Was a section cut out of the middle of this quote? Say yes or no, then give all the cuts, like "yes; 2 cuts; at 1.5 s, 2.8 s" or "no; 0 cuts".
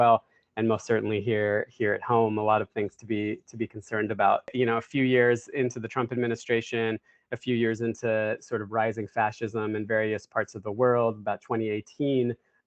yes; 1 cut; at 4.5 s